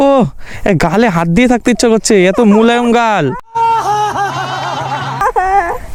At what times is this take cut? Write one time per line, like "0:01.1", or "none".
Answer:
none